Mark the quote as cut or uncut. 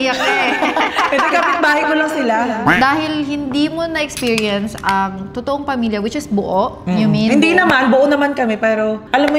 cut